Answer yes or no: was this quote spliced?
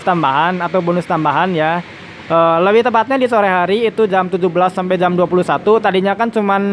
no